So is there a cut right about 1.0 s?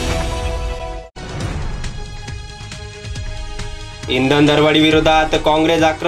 yes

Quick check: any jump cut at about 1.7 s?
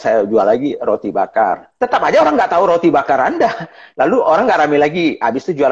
yes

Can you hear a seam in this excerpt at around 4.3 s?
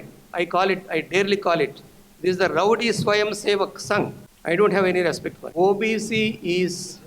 yes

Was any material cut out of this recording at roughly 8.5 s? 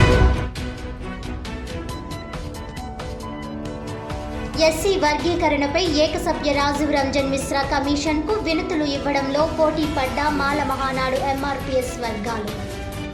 no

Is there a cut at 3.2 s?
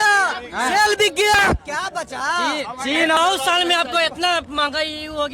yes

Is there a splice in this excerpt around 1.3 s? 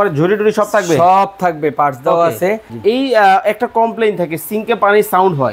no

